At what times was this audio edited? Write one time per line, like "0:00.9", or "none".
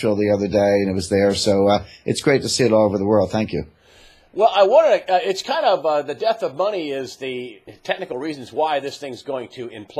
0:05.7